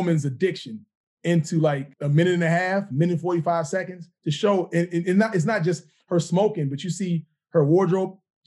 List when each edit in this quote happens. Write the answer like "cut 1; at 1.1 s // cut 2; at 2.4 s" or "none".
cut 1; at 1.9 s